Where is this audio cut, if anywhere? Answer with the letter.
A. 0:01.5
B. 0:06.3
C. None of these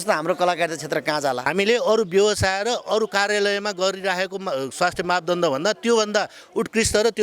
A